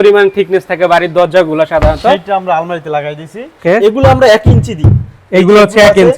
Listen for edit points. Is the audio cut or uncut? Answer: cut